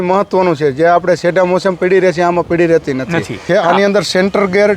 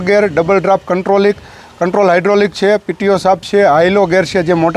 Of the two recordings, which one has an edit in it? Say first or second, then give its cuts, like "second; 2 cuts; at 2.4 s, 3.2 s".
first; 1 cut; at 3.4 s